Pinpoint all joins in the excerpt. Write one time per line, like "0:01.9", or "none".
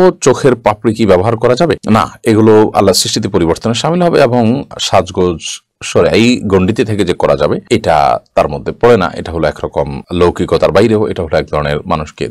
none